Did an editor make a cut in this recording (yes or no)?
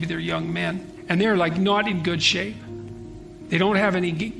yes